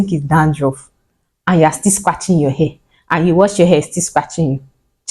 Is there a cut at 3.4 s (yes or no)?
yes